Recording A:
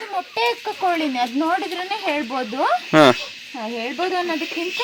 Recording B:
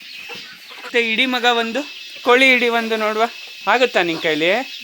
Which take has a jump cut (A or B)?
B